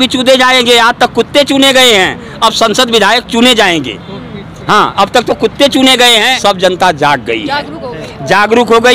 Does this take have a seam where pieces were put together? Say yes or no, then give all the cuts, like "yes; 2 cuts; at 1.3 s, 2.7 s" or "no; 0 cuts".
yes; 1 cut; at 6.3 s